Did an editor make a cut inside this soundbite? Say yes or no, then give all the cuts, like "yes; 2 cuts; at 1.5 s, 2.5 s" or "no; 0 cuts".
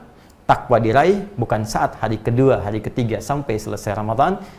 no; 0 cuts